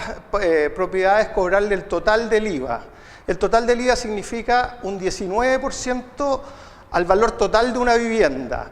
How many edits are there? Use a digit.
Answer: 1